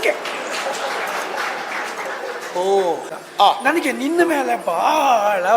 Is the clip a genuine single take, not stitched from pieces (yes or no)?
no